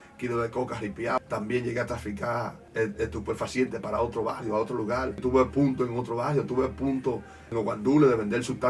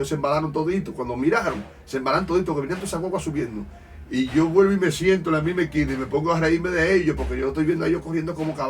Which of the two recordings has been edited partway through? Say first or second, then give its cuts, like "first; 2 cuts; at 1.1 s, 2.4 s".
first; 4 cuts; at 1.2 s, 2.6 s, 5.2 s, 7.5 s